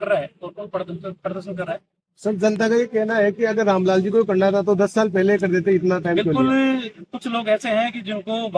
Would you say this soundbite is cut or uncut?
uncut